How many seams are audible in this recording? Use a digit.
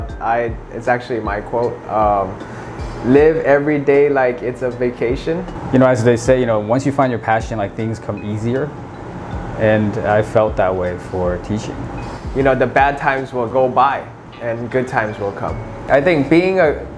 3